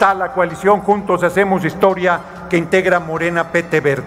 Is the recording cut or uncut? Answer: uncut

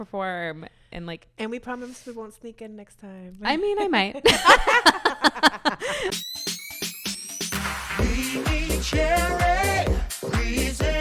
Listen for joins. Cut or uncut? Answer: cut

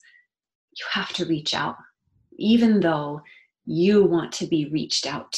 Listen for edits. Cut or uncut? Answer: uncut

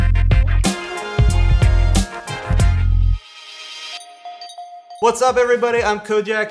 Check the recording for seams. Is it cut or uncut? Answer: uncut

